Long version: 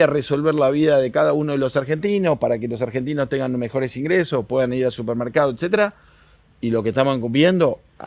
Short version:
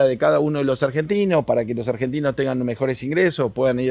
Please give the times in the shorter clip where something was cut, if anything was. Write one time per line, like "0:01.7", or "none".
none